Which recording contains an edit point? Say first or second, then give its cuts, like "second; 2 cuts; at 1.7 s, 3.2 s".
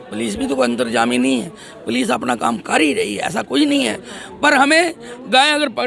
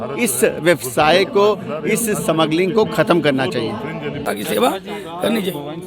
second; 1 cut; at 4.2 s